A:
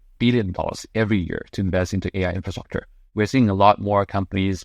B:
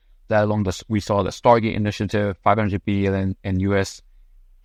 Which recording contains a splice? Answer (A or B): A